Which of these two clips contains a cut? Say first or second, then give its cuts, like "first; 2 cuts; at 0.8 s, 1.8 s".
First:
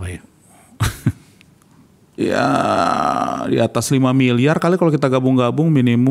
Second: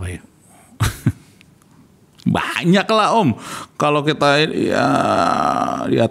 first; 1 cut; at 2.2 s